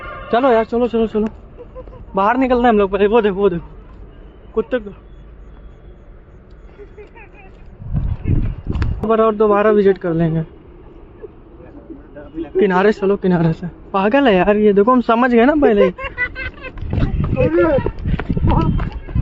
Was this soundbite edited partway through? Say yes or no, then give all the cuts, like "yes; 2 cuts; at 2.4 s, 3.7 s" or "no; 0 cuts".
yes; 1 cut; at 9.1 s